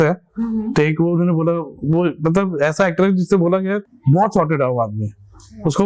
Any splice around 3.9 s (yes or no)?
yes